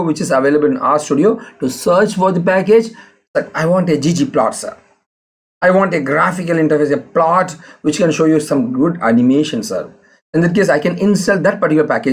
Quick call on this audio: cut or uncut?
uncut